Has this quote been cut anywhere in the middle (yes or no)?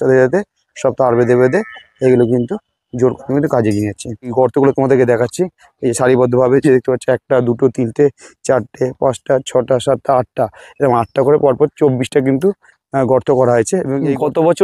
no